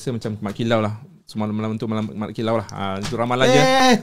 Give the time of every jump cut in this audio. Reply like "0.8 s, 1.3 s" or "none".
none